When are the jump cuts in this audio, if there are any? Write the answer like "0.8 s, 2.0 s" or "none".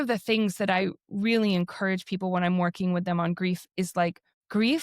3.9 s